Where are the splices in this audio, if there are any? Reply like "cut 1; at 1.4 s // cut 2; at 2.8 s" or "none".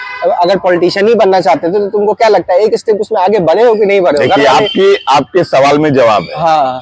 none